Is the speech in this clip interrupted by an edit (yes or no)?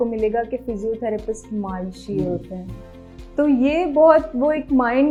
no